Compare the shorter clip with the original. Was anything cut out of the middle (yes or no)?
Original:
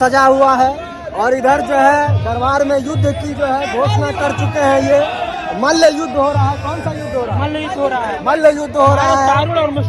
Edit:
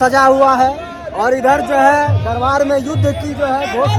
no